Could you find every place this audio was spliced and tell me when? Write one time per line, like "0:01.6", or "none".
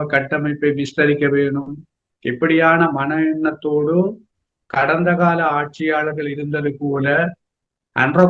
none